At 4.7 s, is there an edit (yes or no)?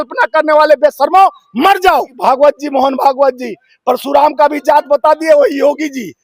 no